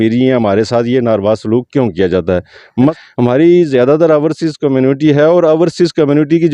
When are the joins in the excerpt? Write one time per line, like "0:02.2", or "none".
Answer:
0:03.0